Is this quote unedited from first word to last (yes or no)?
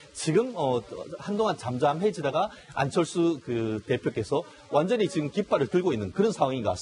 yes